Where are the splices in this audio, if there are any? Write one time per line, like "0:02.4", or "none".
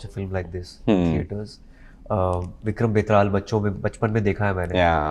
none

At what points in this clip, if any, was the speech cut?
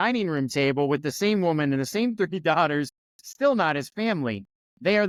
none

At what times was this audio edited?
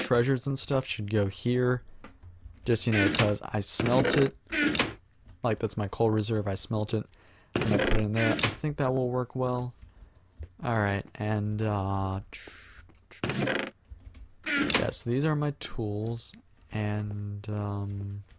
0:12.0

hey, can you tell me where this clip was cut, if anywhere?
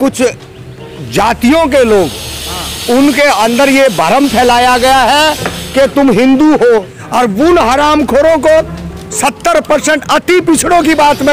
0:07.0

